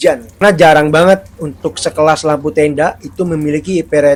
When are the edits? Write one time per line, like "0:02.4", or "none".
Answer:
none